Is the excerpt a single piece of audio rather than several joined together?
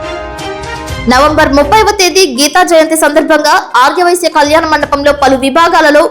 no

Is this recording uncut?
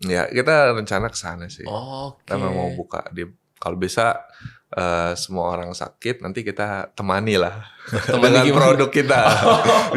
yes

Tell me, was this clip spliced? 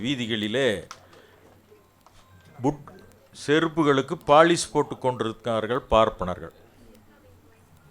no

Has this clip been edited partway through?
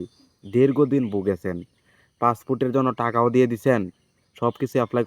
no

